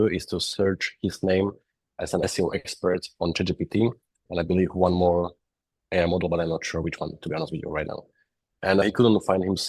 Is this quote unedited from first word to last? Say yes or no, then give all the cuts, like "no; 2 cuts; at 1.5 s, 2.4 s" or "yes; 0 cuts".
no; 1 cut; at 2.2 s